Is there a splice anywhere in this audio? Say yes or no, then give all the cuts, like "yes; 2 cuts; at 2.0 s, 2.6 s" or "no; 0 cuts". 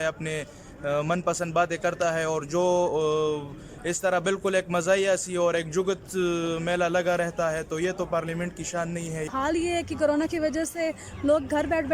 yes; 1 cut; at 9.3 s